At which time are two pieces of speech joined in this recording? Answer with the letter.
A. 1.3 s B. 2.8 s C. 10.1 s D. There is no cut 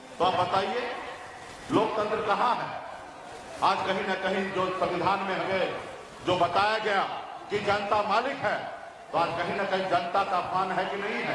D